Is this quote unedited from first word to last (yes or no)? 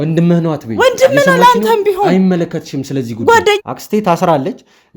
no